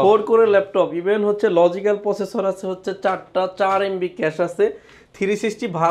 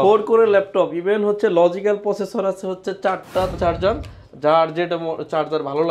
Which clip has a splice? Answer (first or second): second